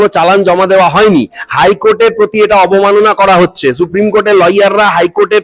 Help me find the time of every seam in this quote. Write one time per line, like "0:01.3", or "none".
none